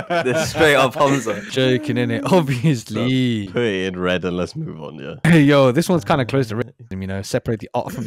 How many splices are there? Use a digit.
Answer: 2